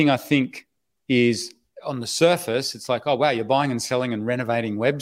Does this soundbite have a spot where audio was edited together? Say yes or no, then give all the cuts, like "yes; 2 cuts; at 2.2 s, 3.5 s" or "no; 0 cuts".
no; 0 cuts